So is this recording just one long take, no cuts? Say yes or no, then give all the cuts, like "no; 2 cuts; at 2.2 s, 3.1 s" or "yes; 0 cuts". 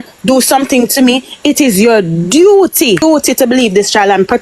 no; 1 cut; at 3.0 s